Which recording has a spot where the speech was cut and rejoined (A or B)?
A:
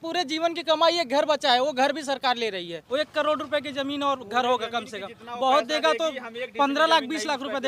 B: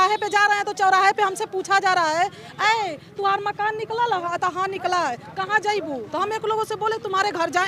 A